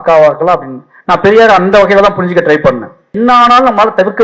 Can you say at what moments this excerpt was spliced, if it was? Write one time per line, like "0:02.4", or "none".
0:03.1

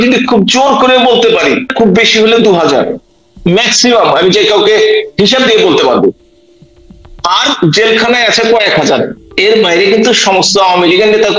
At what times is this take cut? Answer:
0:01.7

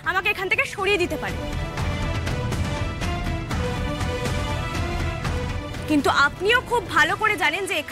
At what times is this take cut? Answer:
none

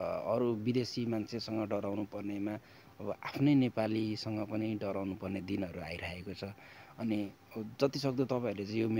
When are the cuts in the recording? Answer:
none

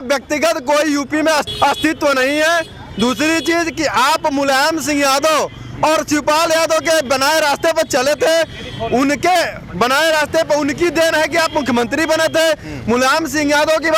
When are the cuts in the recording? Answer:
none

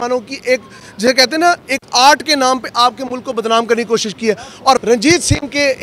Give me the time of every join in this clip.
0:04.8

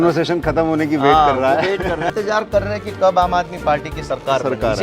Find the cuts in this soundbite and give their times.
0:02.1

